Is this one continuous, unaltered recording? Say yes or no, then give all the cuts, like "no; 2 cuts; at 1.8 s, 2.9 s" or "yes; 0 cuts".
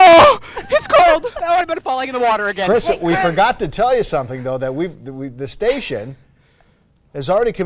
yes; 0 cuts